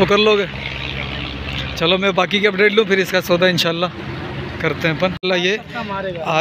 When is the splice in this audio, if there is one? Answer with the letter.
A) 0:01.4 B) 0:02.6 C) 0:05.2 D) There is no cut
C